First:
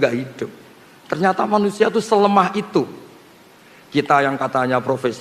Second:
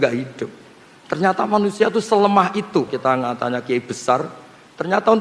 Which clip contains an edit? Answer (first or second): second